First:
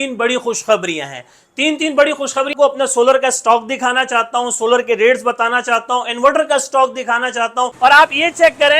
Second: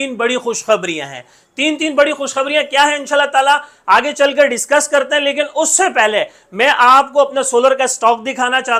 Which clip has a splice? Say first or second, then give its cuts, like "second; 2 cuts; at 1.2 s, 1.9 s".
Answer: first; 2 cuts; at 2.5 s, 7.7 s